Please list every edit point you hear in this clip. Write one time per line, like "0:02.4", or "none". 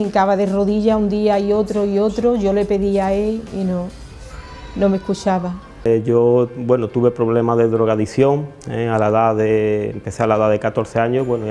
0:05.9